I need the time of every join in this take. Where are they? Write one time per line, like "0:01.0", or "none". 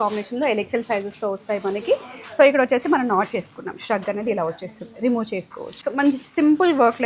0:05.7